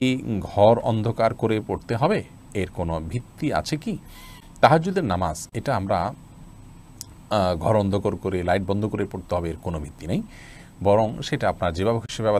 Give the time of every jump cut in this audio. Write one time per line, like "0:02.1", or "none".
none